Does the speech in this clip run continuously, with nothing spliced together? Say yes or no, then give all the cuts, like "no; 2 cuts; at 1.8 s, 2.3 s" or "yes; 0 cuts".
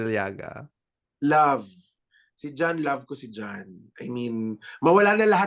yes; 0 cuts